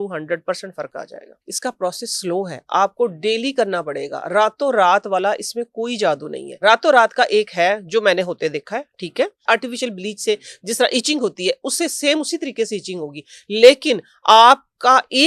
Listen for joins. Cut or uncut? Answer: cut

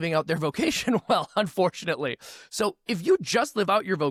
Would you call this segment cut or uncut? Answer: uncut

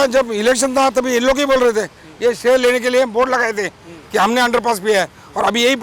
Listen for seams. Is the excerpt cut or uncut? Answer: uncut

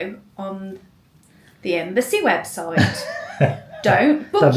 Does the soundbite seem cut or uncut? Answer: uncut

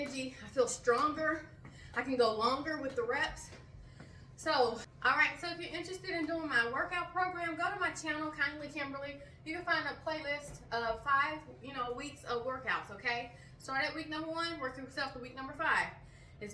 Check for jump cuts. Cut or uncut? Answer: cut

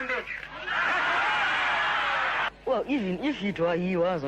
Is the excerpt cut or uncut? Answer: cut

